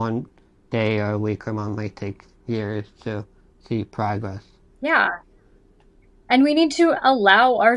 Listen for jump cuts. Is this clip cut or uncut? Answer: uncut